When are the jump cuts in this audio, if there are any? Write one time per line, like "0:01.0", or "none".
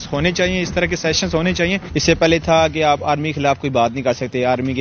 0:01.8